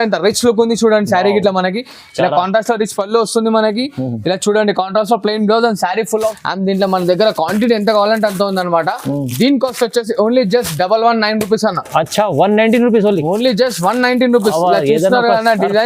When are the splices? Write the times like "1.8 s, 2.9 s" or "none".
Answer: 6.2 s